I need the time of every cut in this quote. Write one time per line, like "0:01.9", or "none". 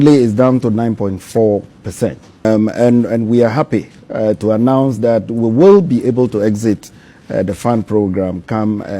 0:02.4